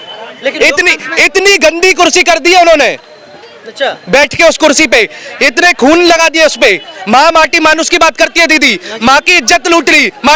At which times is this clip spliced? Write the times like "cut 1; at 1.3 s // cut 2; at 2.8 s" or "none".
none